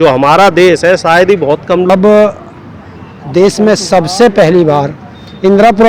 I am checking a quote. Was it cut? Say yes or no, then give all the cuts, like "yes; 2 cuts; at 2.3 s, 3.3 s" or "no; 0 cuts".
yes; 1 cut; at 1.9 s